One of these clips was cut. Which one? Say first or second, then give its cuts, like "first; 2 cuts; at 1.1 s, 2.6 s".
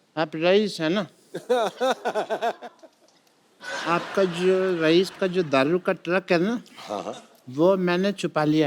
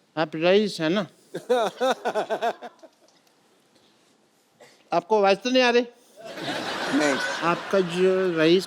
first; 1 cut; at 3.7 s